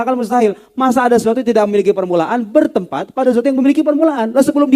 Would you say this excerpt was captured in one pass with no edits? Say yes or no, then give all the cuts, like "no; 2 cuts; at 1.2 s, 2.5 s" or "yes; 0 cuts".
yes; 0 cuts